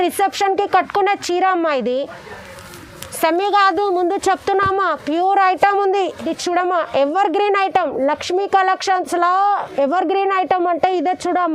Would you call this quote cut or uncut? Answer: cut